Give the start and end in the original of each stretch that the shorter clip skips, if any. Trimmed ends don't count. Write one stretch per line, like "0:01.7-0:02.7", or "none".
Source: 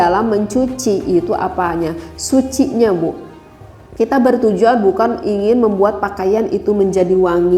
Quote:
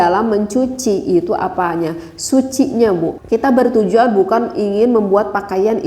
0:03.2-0:03.9